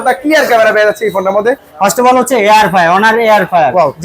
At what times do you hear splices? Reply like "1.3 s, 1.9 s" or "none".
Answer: 1.7 s

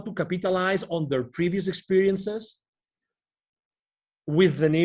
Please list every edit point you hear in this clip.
none

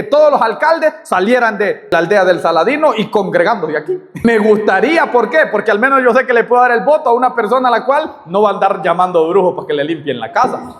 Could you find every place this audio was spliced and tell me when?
1.9 s, 4.2 s

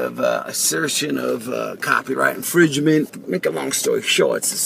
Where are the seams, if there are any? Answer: 2.0 s

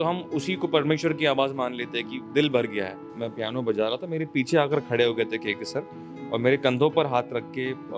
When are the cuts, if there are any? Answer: 3.1 s

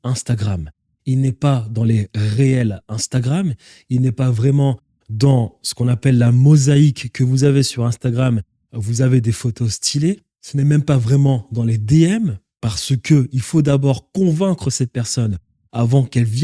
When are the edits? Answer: 10.4 s

